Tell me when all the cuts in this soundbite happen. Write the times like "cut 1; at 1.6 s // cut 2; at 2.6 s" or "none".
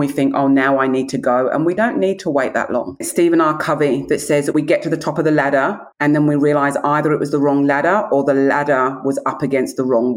cut 1; at 1.8 s // cut 2; at 3.1 s // cut 3; at 5.9 s